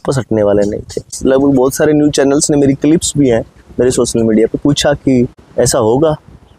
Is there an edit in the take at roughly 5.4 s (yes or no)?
yes